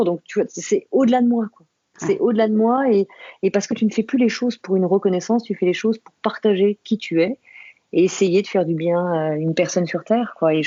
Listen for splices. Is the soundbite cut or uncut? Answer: uncut